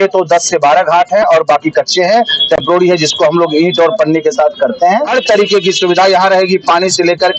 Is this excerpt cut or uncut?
cut